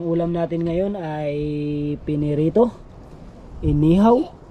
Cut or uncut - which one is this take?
uncut